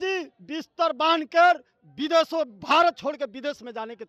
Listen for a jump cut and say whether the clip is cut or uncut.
uncut